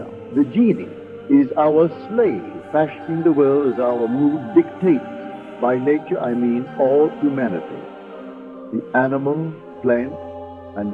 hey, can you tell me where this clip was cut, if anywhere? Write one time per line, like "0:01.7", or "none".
none

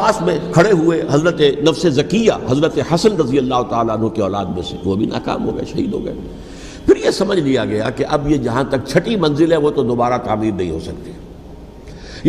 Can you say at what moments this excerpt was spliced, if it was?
none

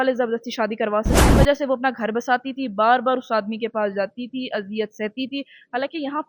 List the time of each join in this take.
0:01.3

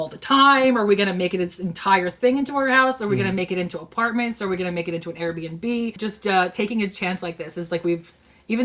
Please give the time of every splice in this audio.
0:06.0

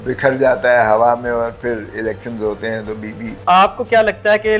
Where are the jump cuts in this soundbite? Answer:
0:03.4

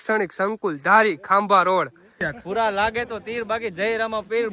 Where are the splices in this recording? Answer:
0:02.3

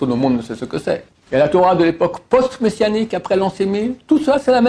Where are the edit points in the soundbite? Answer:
0:01.1

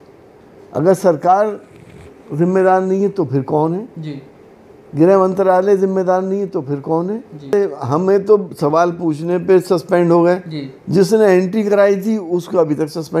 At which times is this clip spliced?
0:07.5

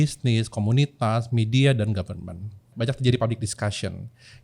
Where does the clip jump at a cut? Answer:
0:02.7

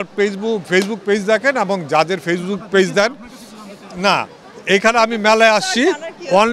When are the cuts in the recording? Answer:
none

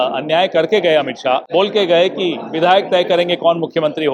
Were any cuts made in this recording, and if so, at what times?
0:01.4

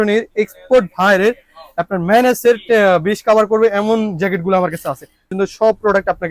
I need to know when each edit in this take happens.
0:05.3

